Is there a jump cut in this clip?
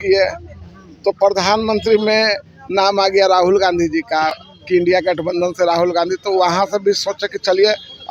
no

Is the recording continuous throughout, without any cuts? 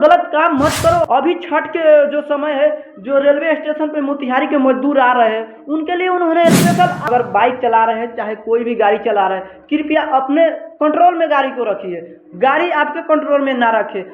no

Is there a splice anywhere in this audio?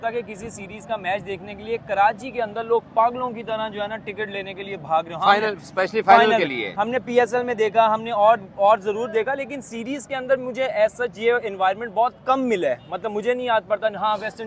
no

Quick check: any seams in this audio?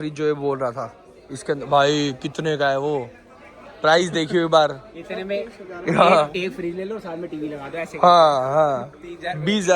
no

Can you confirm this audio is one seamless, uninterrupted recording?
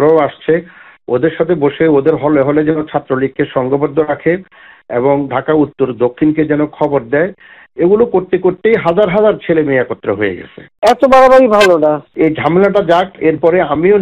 no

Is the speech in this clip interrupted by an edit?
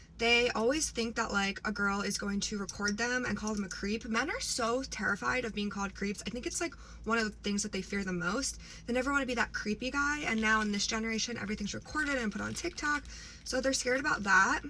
no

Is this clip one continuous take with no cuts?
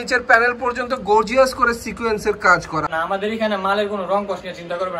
no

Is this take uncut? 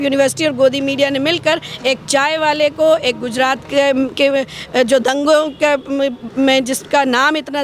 yes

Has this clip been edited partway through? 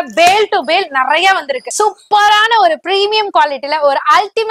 yes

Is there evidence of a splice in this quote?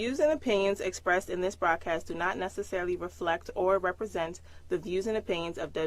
yes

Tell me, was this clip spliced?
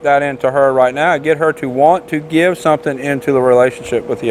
no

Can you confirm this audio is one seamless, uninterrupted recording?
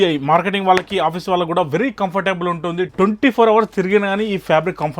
yes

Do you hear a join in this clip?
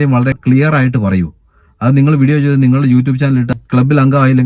no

